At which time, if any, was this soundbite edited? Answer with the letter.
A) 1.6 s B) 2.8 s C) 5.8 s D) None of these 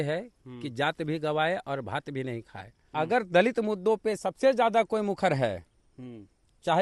B